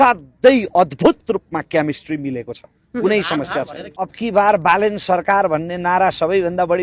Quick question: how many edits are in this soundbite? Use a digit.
1